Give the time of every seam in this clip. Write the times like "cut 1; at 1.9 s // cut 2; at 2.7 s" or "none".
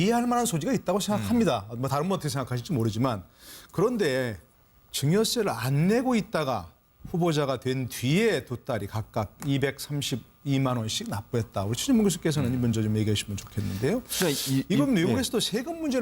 cut 1; at 14.8 s